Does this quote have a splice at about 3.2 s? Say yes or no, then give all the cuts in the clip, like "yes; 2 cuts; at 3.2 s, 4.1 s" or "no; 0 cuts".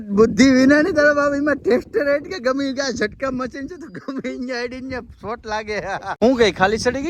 no; 1 cut; at 6.2 s